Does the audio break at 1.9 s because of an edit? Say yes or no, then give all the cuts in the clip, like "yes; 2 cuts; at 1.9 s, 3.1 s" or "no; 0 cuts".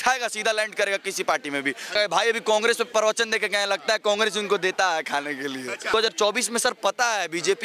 yes; 2 cuts; at 1.9 s, 5.9 s